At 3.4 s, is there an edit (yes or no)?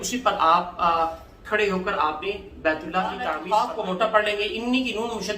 yes